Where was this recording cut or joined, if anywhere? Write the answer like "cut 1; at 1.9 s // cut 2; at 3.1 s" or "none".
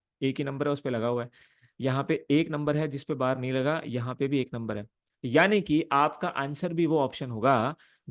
none